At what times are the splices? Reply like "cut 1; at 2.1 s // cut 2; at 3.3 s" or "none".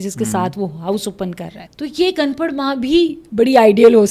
cut 1; at 1.6 s